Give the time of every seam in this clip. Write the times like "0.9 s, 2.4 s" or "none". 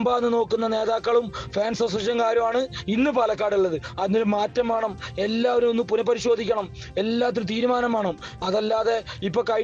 none